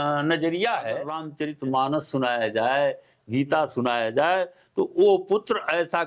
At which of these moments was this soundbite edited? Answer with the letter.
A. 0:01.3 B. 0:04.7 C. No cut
A